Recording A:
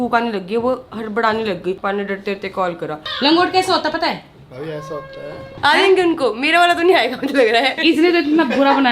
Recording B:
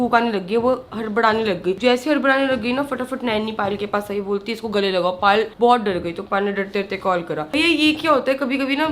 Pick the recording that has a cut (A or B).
A